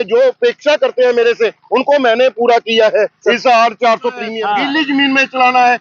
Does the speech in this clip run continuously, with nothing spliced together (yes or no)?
no